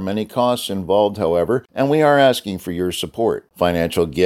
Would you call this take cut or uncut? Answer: cut